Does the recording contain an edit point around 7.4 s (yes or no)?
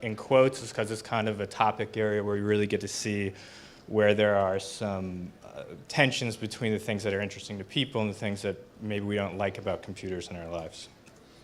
yes